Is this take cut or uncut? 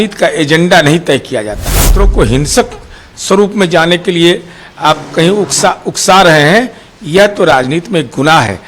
cut